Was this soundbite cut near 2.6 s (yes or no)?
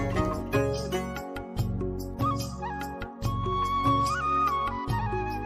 no